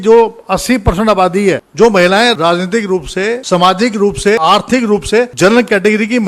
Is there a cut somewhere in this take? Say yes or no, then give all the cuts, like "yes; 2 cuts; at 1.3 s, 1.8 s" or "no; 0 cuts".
yes; 5 cuts; at 1.7 s, 2.4 s, 3.4 s, 4.4 s, 5.3 s